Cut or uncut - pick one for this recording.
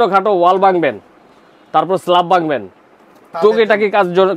uncut